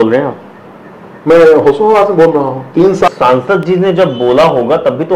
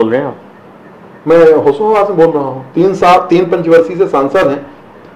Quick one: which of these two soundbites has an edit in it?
first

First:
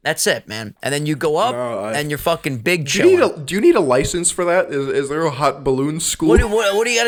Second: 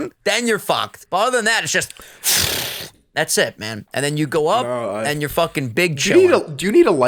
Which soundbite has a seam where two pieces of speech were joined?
second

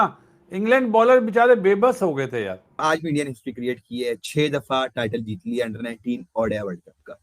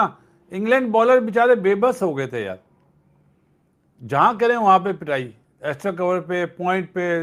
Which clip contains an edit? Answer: first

